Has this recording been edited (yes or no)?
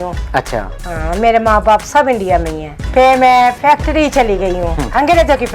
yes